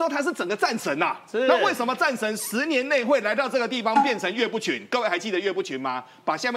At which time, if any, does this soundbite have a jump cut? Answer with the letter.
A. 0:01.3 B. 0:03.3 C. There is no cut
C